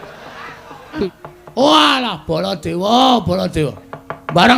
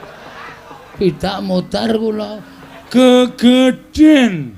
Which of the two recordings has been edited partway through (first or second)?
first